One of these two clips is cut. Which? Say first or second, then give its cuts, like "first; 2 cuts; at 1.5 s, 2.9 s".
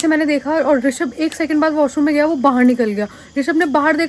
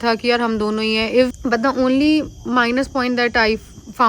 second; 1 cut; at 1.4 s